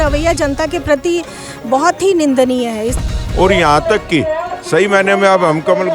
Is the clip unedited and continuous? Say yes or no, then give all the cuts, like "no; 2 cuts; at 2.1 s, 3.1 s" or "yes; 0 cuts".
no; 1 cut; at 3.0 s